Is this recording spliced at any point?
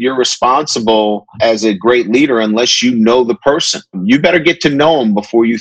yes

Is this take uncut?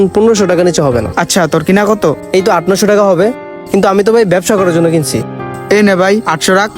no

